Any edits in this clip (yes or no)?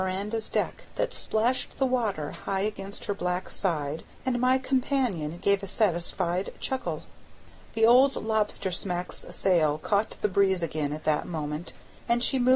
no